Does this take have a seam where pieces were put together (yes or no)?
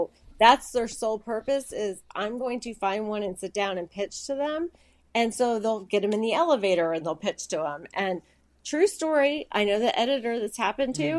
no